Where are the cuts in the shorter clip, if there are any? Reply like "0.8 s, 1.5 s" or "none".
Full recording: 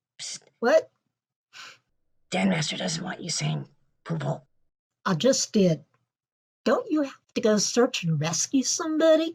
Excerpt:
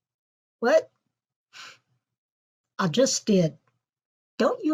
2.2 s